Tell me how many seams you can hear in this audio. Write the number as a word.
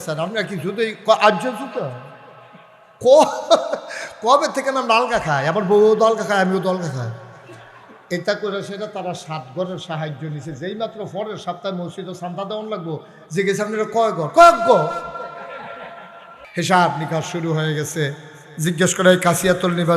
one